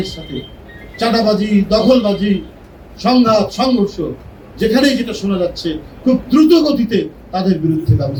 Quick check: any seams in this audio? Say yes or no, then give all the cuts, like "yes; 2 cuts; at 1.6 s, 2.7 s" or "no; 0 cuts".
no; 0 cuts